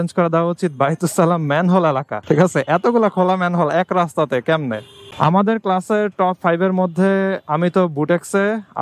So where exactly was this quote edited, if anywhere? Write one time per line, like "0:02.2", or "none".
0:02.1
0:05.1